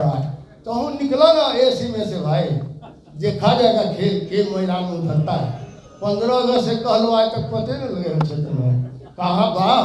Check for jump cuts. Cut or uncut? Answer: uncut